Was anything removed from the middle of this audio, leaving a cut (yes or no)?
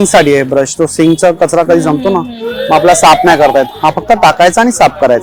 no